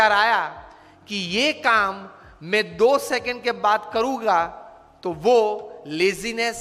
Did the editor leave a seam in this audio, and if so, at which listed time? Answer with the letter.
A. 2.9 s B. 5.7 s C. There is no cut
C